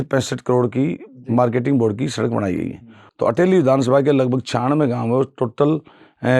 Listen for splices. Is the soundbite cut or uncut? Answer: cut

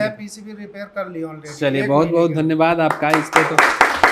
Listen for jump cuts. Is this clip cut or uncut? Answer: uncut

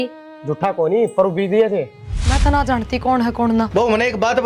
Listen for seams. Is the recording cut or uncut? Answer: cut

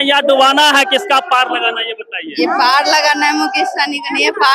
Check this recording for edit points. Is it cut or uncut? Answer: uncut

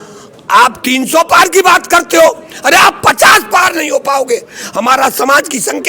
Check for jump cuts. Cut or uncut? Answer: uncut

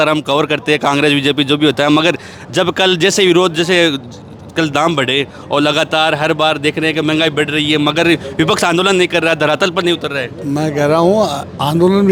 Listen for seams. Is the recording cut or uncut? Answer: uncut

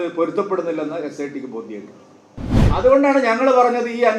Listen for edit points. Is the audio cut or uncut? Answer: cut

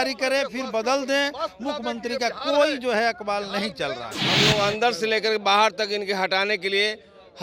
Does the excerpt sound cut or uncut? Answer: cut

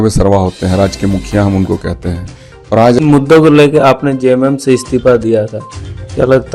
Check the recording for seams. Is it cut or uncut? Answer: cut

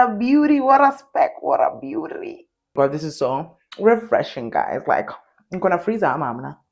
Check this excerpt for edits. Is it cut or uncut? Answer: cut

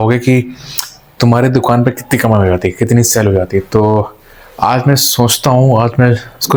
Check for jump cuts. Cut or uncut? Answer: uncut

